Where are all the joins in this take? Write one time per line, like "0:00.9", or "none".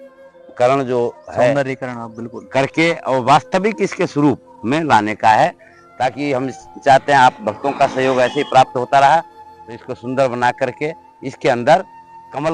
none